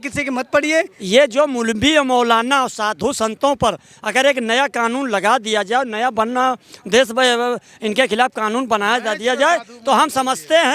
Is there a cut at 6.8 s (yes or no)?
no